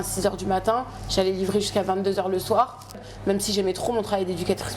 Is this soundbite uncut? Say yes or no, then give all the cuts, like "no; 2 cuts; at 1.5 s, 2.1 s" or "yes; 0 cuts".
no; 1 cut; at 3.1 s